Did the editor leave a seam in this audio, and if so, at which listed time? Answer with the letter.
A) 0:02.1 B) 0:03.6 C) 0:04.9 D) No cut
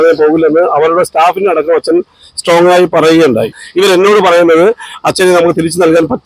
B